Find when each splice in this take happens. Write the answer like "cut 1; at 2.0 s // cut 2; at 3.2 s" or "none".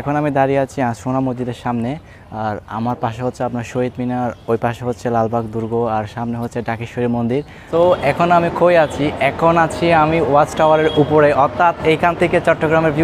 cut 1; at 7.7 s